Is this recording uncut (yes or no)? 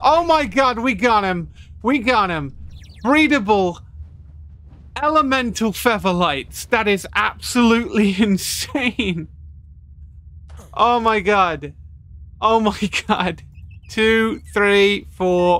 yes